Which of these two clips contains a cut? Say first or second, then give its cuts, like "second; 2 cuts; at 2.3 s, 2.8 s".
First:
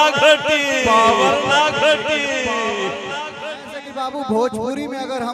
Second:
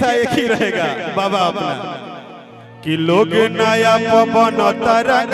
first; 1 cut; at 3.8 s